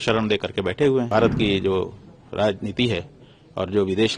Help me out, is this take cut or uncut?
cut